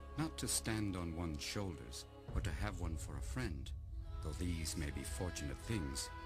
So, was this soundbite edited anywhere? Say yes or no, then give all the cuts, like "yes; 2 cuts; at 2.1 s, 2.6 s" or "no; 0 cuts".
yes; 1 cut; at 5.0 s